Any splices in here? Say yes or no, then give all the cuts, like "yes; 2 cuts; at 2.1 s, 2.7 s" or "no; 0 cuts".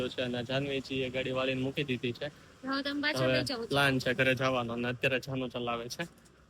no; 0 cuts